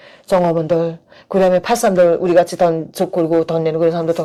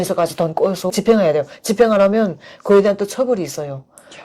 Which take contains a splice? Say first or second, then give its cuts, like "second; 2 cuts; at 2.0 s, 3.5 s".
second; 1 cut; at 0.9 s